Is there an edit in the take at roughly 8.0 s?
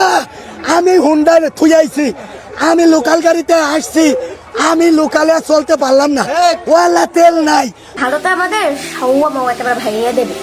yes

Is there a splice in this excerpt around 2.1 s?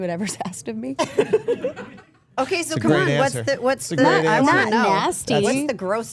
no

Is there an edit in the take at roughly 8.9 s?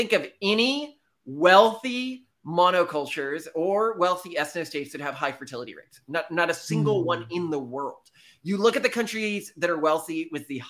no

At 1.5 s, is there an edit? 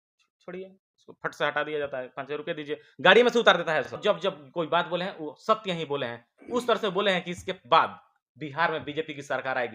no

